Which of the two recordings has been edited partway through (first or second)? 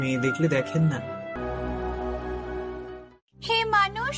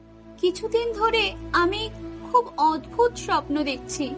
first